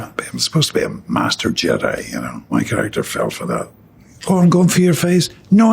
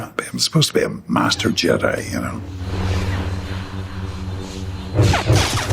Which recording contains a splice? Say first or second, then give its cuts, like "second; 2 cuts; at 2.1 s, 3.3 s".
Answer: first; 1 cut; at 2.4 s